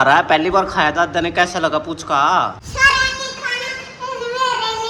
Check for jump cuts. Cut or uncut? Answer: cut